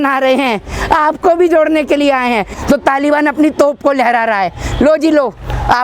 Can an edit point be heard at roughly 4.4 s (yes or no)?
no